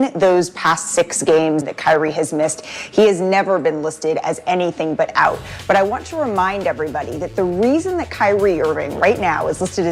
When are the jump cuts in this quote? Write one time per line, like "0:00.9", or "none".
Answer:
0:01.6